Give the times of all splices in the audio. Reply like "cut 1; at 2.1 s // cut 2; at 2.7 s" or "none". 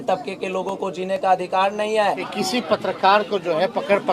cut 1; at 2.3 s